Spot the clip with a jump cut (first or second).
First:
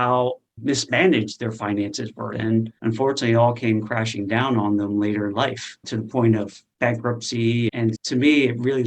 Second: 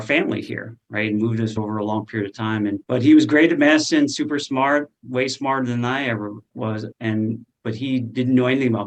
first